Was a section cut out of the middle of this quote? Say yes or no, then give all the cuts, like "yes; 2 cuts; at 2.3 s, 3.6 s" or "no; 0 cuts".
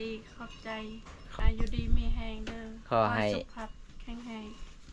yes; 1 cut; at 1.3 s